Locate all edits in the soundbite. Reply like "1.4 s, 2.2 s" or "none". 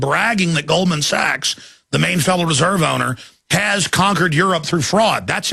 none